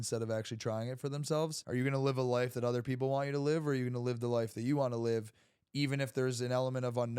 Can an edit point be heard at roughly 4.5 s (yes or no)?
no